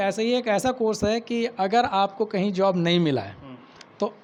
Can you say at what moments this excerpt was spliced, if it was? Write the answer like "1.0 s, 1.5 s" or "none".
none